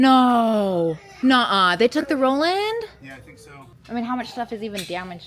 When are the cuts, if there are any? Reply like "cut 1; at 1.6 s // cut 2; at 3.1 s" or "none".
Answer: cut 1; at 1.1 s // cut 2; at 3.8 s